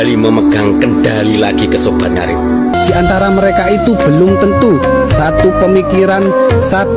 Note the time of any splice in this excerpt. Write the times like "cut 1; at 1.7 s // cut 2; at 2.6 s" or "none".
cut 1; at 2.7 s